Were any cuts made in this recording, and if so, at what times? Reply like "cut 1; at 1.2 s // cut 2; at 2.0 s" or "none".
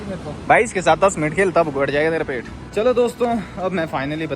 cut 1; at 2.5 s

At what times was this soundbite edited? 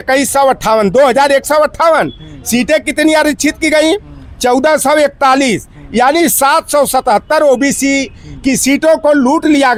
none

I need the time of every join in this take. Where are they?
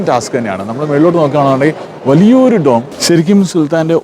cut 1; at 2.9 s

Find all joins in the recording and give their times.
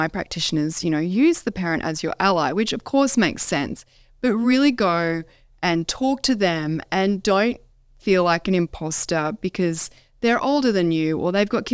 none

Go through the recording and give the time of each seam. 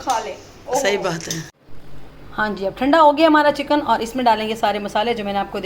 cut 1; at 1.6 s

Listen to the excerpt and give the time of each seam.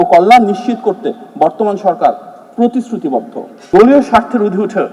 cut 1; at 3.5 s

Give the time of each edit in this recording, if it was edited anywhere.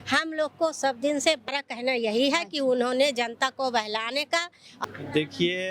cut 1; at 1.5 s // cut 2; at 4.7 s

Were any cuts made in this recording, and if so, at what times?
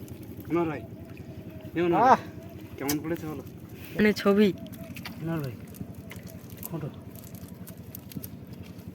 cut 1; at 4.0 s

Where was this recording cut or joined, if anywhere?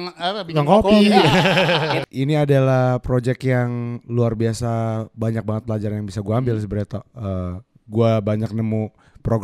cut 1; at 2.0 s

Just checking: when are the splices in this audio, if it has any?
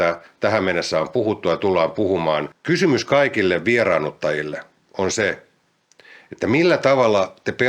cut 1; at 2.5 s

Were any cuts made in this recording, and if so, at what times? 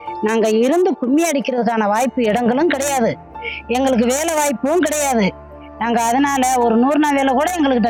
none

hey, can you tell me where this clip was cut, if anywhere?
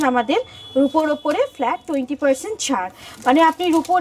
none

